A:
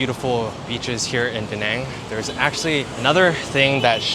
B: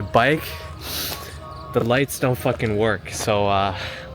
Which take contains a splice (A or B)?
A